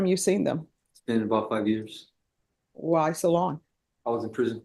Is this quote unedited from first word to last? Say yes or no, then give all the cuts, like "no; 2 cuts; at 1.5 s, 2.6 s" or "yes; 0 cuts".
yes; 0 cuts